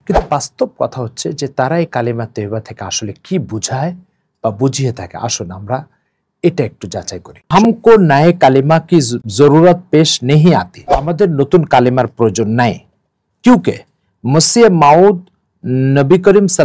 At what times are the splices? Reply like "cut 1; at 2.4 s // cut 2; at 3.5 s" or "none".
cut 1; at 7.5 s // cut 2; at 9.2 s // cut 3; at 11.1 s